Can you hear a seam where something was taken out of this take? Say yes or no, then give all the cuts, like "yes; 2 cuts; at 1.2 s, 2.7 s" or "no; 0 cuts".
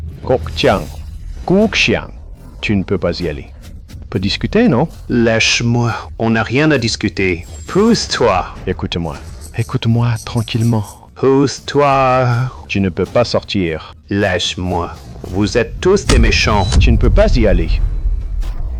no; 0 cuts